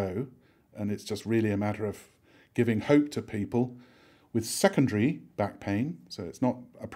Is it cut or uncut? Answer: uncut